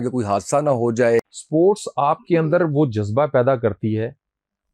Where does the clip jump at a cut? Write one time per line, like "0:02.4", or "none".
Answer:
0:01.4